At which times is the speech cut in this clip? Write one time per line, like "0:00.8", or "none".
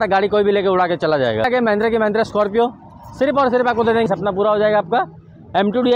0:01.5
0:04.1